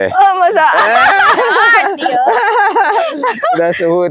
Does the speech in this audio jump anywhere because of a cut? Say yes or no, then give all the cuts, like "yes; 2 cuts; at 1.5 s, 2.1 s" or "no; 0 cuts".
no; 0 cuts